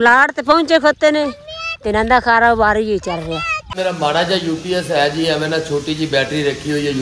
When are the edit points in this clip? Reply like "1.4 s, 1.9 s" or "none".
3.6 s